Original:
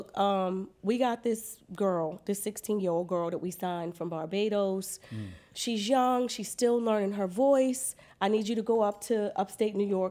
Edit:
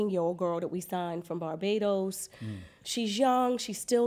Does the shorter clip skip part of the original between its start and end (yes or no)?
no